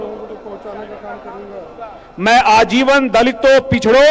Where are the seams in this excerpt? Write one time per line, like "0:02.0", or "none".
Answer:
none

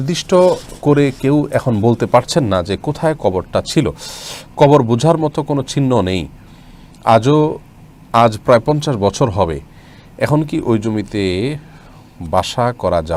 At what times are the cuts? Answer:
none

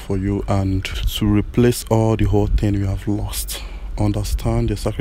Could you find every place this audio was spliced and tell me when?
0:01.0

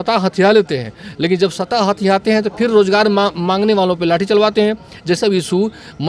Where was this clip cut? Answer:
0:05.2

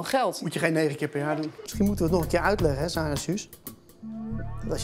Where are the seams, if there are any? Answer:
0:01.6

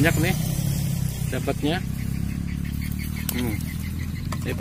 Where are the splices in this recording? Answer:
none

